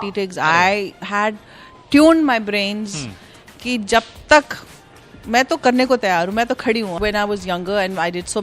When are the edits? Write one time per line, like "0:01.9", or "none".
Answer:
0:06.9